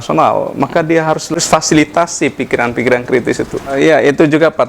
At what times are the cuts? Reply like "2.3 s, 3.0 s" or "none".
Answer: 1.3 s, 3.6 s